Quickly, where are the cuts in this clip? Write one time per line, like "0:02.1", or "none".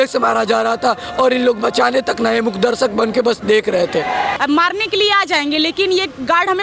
0:04.3